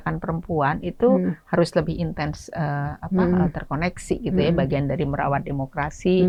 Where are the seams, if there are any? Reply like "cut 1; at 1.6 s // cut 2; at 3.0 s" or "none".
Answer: none